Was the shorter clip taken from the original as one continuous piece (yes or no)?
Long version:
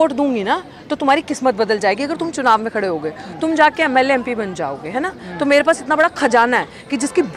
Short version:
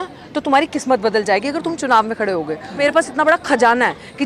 no